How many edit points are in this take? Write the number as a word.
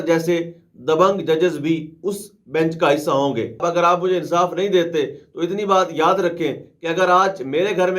one